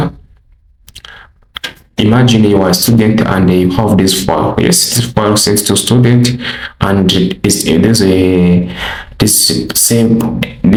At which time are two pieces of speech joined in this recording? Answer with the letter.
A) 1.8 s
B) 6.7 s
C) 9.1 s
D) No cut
D